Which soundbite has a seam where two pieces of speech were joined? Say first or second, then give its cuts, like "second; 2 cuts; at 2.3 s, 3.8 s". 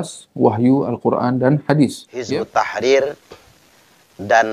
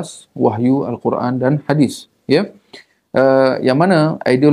first; 1 cut; at 2.1 s